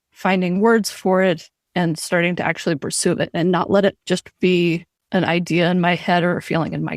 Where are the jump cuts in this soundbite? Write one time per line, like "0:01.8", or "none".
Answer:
0:01.6
0:04.9